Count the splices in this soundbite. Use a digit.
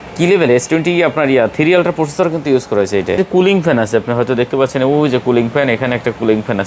1